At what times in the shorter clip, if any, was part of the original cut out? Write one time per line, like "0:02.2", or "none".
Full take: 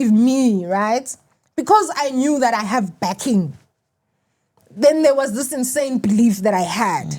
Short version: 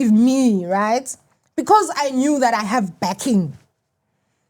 none